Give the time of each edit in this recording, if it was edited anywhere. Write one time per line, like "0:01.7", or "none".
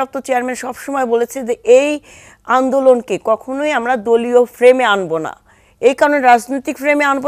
none